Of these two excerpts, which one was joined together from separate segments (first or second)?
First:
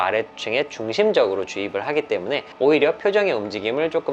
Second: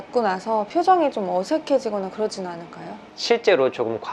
second